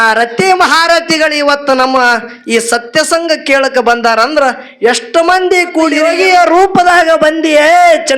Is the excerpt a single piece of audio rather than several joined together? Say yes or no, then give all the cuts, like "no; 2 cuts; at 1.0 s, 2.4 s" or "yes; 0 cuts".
no; 1 cut; at 6.0 s